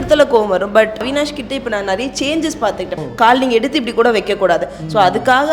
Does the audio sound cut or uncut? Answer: cut